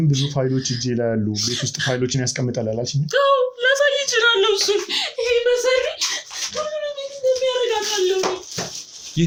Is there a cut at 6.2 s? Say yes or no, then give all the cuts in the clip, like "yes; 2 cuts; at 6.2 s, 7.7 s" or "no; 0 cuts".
no; 0 cuts